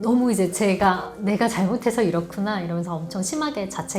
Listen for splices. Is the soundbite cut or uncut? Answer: uncut